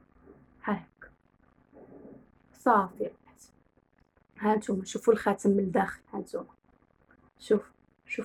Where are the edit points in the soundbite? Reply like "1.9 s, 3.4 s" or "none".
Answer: none

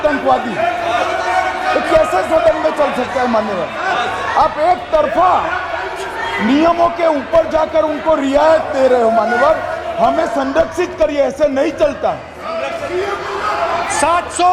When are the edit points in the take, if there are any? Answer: none

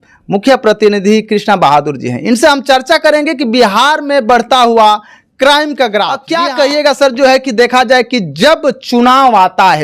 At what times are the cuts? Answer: 6.2 s

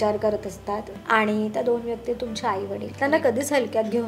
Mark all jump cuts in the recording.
0.9 s, 2.9 s

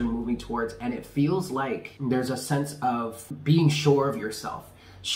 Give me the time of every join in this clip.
1.9 s, 3.3 s

